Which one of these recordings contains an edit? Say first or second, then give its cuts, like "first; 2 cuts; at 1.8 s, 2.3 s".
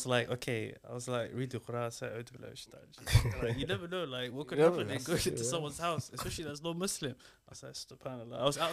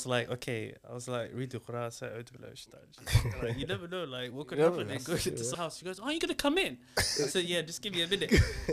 second; 1 cut; at 5.5 s